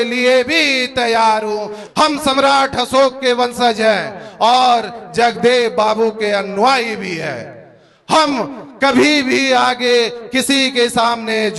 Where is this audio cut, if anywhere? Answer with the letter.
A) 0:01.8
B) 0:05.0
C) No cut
A